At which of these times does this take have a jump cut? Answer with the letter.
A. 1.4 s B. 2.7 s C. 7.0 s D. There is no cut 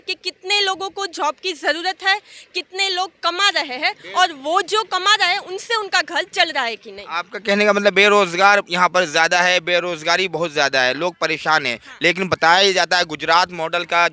D